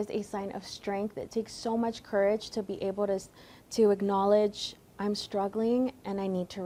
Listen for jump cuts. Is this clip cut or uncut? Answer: uncut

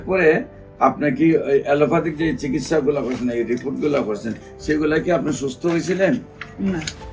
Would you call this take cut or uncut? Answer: uncut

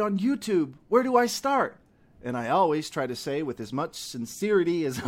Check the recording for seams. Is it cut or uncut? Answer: uncut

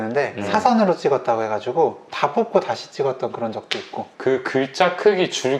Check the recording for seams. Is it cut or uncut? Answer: cut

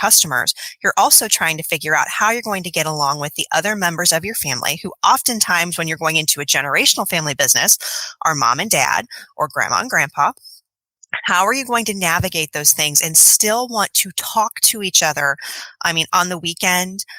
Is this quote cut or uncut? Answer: uncut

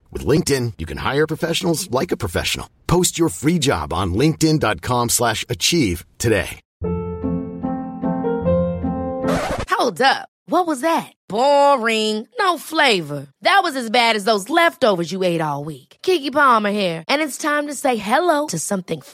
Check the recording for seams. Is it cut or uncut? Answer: cut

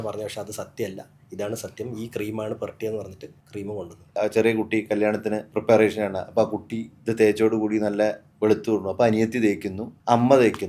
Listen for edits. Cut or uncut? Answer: cut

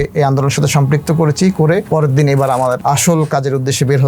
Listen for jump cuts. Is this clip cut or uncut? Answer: cut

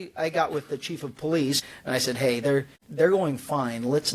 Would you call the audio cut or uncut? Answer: cut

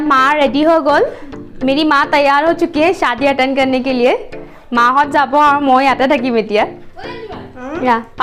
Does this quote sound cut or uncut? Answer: uncut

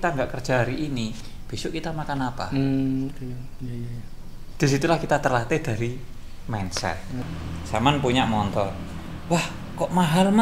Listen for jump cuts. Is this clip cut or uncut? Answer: cut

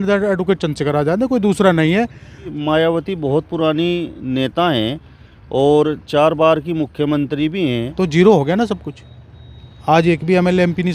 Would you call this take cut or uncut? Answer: cut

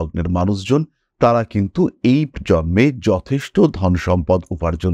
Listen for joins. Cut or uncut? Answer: uncut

